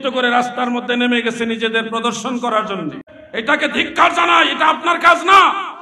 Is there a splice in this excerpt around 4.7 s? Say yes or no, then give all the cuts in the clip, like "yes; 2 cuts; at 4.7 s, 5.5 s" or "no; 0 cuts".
no; 1 cut; at 3.2 s